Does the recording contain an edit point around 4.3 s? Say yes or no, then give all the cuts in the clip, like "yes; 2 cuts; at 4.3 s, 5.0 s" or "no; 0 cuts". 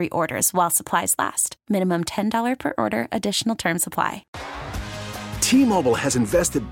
yes; 1 cut; at 4.3 s